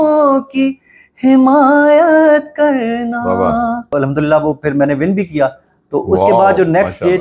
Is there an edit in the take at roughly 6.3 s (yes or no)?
no